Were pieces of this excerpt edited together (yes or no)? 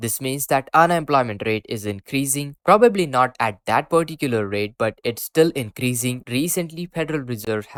no